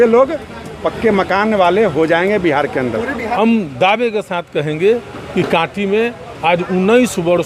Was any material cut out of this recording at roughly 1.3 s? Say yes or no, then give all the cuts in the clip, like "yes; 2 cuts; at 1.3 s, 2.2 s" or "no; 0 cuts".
no; 1 cut; at 3.3 s